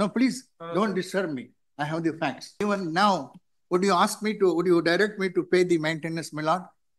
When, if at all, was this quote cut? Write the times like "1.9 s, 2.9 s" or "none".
2.5 s